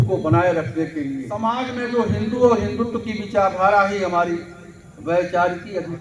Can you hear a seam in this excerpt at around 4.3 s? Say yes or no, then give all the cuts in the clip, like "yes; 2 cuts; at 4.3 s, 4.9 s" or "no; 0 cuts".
no; 1 cut; at 1.4 s